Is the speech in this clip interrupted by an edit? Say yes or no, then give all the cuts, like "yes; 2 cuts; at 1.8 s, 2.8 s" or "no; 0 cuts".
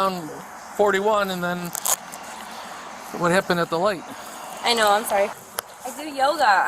yes; 1 cut; at 5.4 s